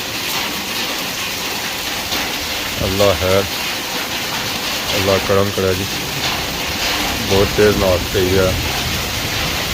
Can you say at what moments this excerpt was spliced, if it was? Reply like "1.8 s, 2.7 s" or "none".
none